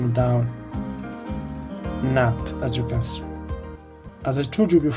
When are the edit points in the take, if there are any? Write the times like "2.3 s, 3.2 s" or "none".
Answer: 4.0 s

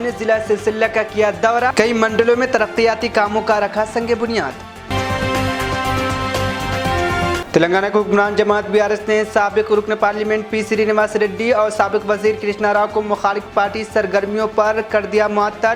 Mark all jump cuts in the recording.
none

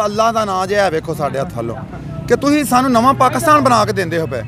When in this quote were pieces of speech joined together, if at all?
none

